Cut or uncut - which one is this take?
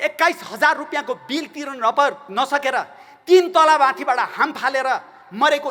uncut